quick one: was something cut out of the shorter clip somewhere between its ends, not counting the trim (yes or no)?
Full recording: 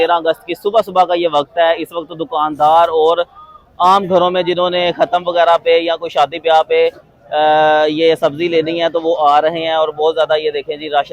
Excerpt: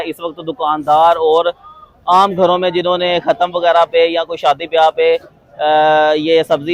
no